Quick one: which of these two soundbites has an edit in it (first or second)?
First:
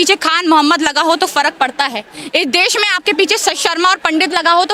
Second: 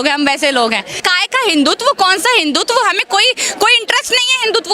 second